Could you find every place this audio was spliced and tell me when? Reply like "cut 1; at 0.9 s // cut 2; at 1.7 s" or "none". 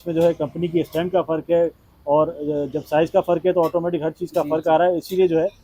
none